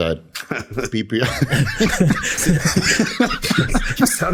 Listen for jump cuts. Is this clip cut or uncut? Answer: uncut